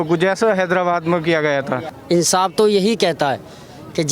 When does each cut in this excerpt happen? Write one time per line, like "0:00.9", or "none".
0:01.9